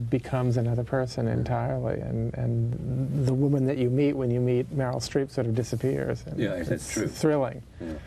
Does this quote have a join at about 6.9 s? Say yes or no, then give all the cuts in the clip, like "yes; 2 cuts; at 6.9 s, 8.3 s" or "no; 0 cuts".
no; 1 cut; at 4.1 s